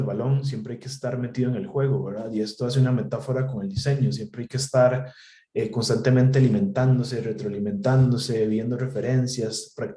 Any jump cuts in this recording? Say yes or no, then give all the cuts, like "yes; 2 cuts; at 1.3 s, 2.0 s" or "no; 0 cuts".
no; 0 cuts